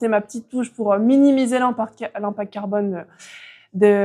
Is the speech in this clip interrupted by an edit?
no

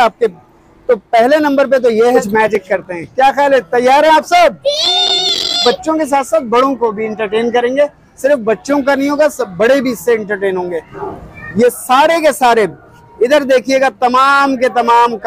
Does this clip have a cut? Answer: yes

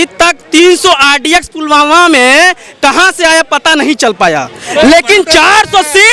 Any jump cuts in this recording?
no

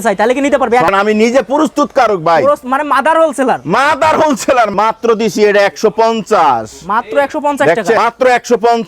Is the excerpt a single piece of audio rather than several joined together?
no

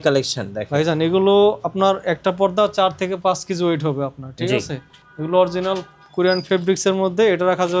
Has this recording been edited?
no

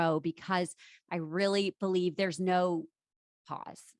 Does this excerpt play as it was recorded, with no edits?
yes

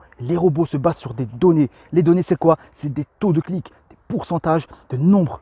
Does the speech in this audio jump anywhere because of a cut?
no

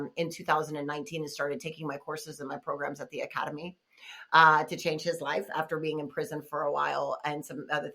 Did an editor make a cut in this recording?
no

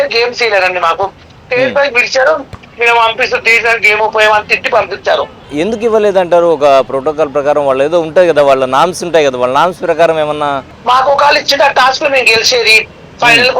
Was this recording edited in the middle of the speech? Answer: yes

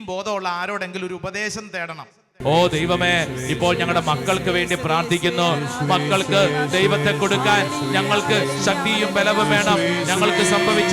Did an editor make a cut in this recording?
yes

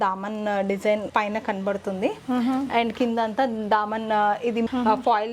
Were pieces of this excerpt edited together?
no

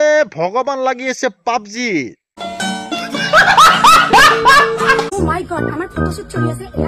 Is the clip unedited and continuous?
no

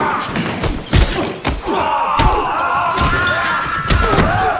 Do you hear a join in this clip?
yes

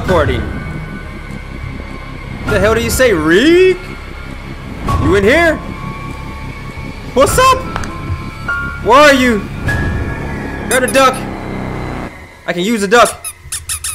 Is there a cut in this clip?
no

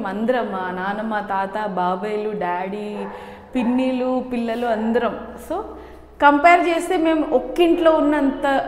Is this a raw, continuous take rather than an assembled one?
yes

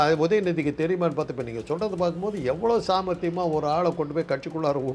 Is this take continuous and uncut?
yes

